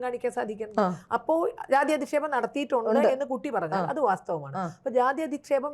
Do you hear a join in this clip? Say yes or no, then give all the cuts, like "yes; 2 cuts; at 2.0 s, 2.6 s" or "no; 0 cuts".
no; 0 cuts